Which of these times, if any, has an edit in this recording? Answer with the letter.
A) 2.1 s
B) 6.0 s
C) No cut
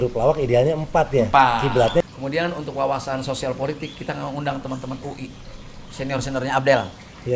A